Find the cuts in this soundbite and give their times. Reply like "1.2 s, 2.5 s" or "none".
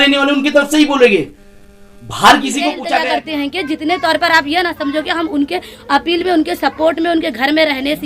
2.9 s

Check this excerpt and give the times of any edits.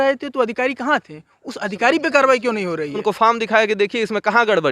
3.0 s

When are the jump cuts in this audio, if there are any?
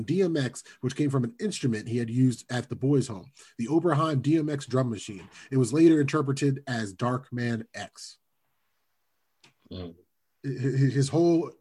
none

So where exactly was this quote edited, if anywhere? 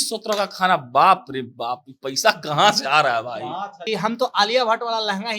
3.8 s

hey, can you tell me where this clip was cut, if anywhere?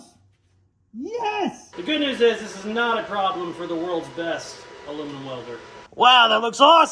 1.7 s, 5.8 s

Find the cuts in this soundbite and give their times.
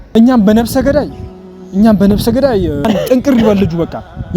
2.9 s

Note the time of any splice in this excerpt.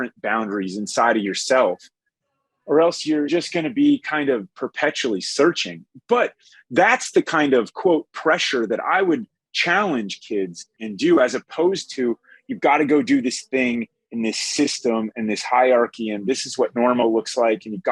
3.3 s, 10.8 s

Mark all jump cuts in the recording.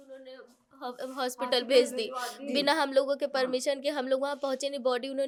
none

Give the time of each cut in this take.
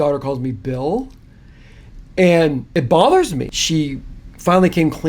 2.6 s, 3.5 s

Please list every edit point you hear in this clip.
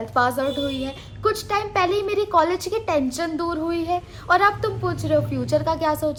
none

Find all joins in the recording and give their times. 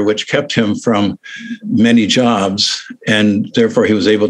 1.5 s

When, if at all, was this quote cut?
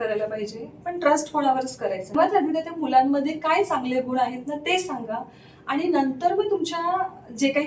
2.2 s

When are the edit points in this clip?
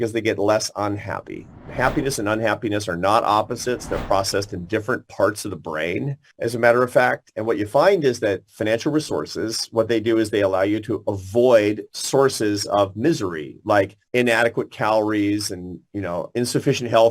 1.5 s, 6.2 s, 14.0 s

